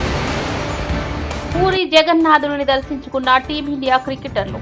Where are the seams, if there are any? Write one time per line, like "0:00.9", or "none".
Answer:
0:01.5